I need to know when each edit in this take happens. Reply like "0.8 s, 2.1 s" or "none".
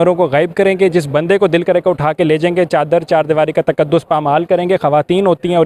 none